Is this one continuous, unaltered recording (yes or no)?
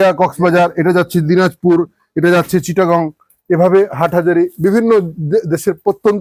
yes